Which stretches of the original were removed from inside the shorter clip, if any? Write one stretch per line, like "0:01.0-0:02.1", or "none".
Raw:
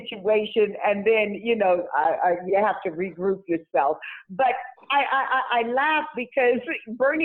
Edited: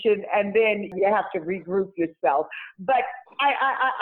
0:01.4-0:02.4